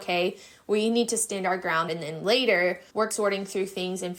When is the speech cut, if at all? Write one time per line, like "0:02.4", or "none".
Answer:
0:01.8
0:03.1